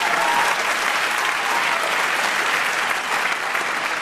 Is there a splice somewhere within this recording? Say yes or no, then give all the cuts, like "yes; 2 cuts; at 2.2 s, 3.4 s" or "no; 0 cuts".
no; 0 cuts